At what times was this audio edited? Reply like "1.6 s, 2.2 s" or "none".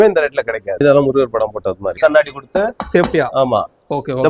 0.8 s, 2.0 s